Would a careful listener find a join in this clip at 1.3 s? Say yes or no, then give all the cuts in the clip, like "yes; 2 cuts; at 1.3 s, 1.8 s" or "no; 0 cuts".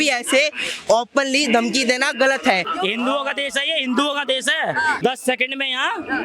no; 2 cuts; at 2.7 s, 5.0 s